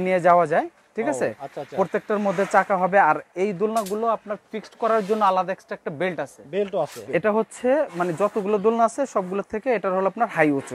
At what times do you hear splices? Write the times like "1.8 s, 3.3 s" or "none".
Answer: 7.1 s